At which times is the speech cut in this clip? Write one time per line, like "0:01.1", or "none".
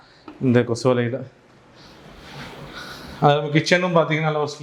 none